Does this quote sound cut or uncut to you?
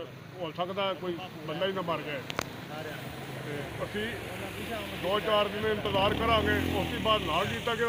uncut